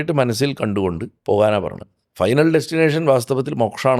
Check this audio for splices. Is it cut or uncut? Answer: cut